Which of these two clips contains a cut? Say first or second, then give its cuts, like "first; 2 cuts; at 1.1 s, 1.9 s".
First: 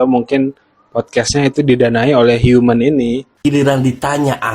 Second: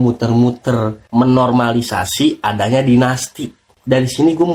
first; 1 cut; at 3.3 s